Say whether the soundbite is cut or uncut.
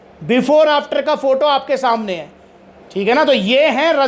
uncut